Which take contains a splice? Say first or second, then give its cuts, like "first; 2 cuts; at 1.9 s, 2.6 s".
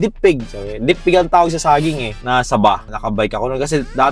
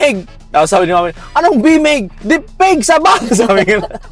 first; 2 cuts; at 2.1 s, 2.9 s